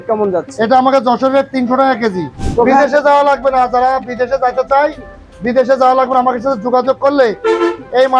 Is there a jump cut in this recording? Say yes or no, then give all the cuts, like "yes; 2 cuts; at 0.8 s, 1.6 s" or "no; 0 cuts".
yes; 1 cut; at 2.3 s